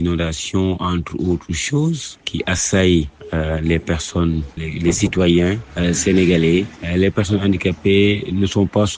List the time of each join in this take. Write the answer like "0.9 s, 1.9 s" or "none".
none